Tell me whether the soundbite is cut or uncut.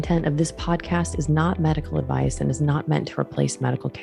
uncut